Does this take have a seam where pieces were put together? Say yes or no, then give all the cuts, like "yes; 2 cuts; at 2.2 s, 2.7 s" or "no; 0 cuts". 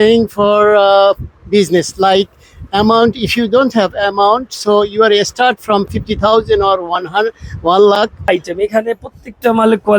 yes; 1 cut; at 8.3 s